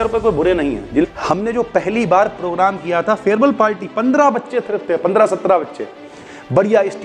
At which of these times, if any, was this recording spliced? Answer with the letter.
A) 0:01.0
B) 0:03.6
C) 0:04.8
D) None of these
A